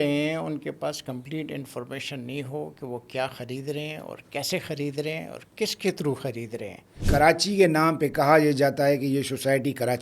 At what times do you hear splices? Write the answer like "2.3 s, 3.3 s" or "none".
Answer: 6.9 s